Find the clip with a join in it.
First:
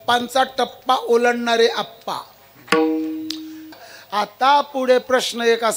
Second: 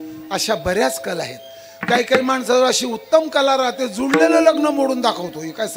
first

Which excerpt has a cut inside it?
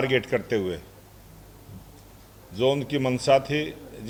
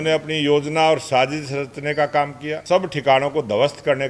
second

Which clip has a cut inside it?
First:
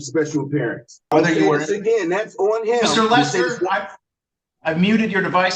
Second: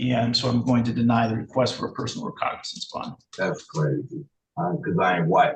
first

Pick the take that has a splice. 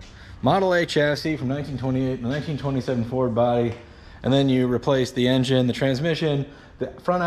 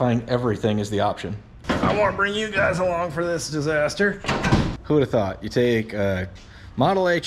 second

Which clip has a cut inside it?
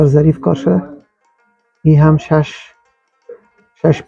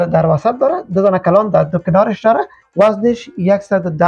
second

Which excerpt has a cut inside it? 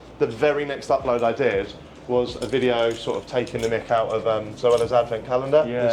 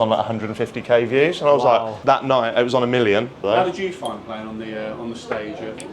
second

